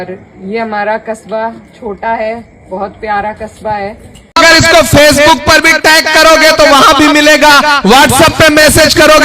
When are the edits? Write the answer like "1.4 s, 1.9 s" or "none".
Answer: 4.3 s